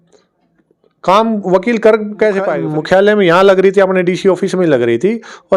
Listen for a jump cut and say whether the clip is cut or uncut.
cut